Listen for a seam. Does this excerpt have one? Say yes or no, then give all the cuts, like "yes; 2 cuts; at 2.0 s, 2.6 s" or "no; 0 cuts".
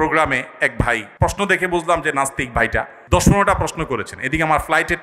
yes; 2 cuts; at 1.1 s, 3.0 s